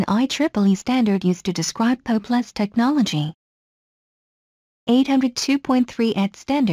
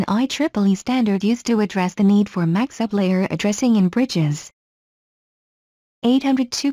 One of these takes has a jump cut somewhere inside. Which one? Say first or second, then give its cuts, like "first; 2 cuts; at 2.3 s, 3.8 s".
first; 1 cut; at 1.2 s